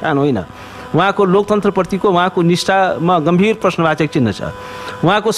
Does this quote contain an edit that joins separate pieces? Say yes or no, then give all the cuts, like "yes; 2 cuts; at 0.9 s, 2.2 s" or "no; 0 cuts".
no; 0 cuts